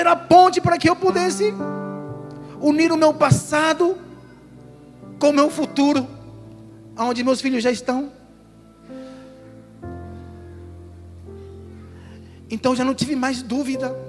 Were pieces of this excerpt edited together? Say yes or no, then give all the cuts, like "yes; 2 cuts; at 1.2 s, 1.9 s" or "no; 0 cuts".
no; 0 cuts